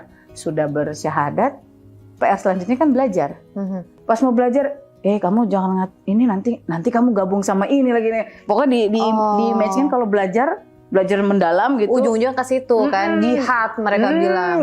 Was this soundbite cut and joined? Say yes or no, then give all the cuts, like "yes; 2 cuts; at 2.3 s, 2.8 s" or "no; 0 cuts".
yes; 1 cut; at 3.9 s